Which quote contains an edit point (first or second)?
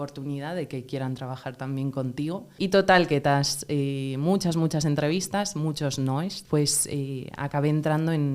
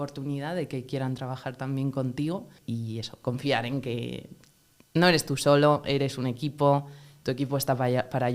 first